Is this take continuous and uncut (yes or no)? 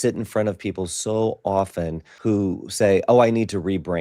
no